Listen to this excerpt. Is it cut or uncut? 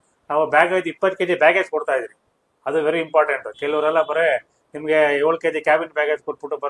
uncut